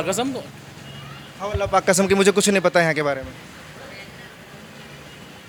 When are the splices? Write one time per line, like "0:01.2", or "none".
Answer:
none